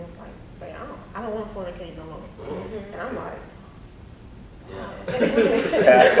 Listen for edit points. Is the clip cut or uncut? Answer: uncut